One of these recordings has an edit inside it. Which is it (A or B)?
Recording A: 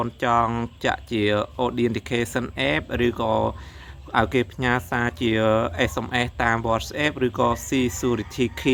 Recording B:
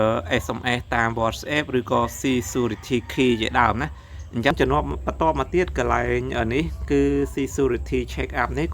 B